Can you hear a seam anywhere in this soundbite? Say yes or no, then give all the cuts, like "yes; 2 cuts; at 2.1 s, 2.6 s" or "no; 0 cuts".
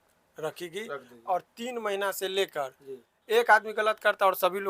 yes; 1 cut; at 3.1 s